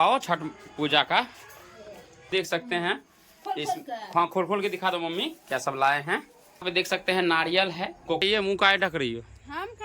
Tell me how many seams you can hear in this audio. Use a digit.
3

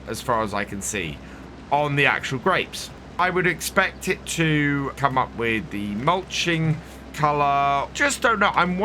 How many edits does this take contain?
4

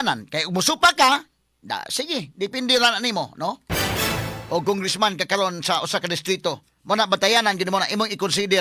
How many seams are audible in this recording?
0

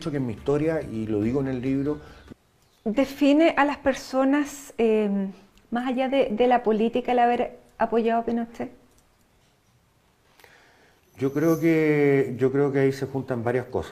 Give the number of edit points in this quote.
1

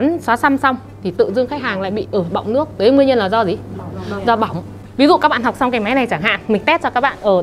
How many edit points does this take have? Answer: 1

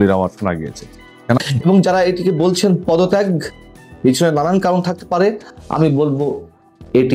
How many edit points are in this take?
1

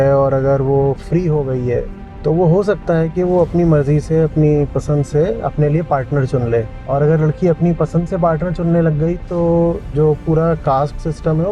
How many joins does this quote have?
2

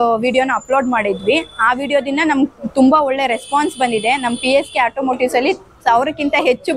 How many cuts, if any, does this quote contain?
0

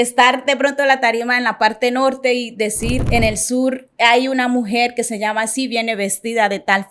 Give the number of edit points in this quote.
1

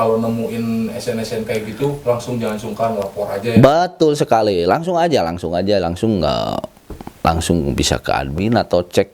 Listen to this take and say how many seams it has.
0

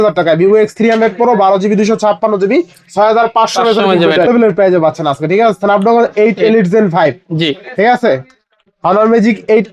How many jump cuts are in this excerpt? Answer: 1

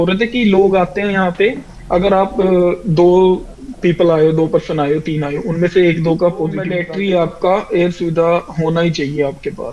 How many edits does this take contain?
1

